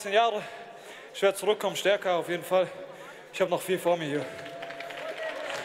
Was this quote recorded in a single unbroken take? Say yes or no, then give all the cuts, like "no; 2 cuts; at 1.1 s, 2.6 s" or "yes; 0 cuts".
yes; 0 cuts